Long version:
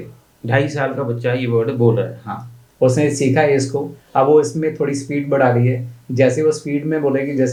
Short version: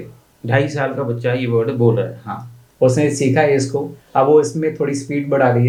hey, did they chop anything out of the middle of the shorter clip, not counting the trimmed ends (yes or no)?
no